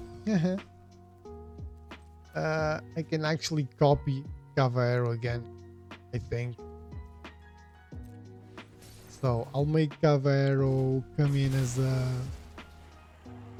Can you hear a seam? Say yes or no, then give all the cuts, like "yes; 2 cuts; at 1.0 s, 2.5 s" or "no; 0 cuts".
no; 0 cuts